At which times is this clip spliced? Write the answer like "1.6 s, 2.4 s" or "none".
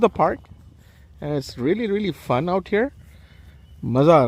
none